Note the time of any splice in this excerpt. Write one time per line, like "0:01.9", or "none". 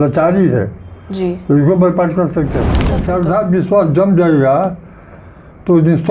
0:03.0